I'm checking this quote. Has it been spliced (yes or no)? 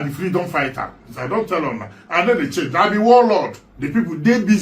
no